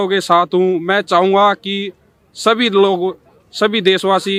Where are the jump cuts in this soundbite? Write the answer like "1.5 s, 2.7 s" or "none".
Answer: none